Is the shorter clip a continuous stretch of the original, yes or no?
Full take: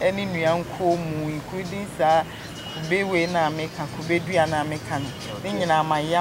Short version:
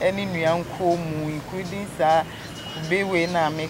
yes